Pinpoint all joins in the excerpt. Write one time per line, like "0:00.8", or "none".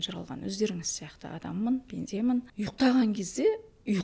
0:02.5